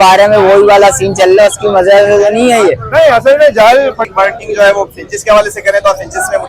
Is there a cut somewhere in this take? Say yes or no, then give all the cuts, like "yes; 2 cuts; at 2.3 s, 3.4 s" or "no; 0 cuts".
yes; 1 cut; at 4.0 s